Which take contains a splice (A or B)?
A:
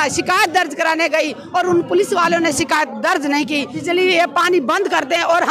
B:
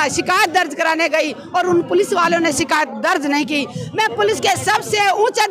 A